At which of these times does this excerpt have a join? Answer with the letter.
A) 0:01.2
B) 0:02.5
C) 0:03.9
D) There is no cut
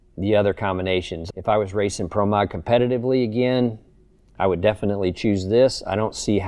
A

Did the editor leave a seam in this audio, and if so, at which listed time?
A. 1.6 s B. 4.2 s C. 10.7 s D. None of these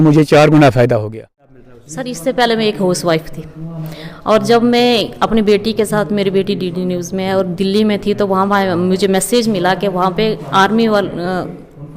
A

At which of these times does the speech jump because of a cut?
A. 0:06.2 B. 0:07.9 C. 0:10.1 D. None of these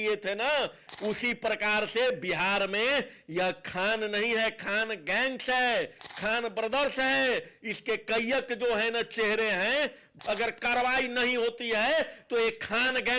C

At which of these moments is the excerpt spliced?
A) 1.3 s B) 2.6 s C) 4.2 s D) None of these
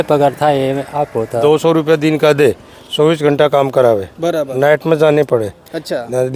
A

